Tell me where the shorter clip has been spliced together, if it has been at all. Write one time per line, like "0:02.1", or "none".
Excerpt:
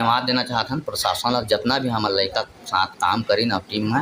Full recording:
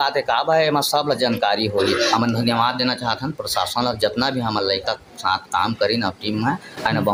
none